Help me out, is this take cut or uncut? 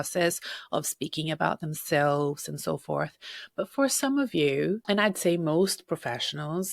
cut